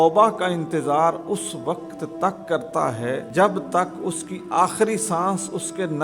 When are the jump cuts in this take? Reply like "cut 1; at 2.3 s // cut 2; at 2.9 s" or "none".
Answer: cut 1; at 3.3 s